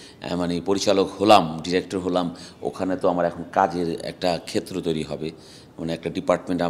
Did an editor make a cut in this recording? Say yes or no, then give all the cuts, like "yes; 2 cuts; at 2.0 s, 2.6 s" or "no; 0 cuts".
no; 0 cuts